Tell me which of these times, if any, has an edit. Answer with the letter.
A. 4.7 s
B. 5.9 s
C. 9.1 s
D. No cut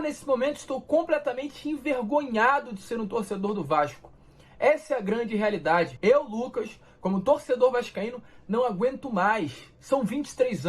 B